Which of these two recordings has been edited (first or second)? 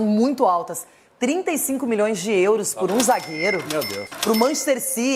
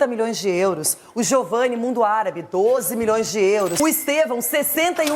second